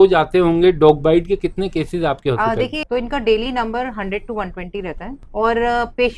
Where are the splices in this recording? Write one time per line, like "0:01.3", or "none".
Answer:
0:02.8
0:05.1